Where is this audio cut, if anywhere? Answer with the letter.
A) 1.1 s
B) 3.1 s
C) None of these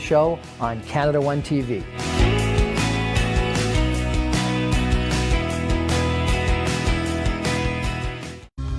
C